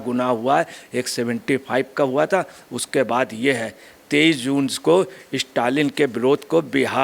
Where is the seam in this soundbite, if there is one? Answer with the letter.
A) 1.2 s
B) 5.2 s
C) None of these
C